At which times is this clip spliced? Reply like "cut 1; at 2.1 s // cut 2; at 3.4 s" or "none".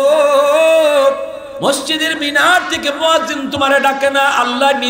cut 1; at 1.4 s